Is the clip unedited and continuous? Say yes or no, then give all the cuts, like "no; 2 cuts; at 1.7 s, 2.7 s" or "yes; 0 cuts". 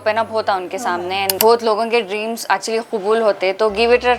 no; 1 cut; at 1.3 s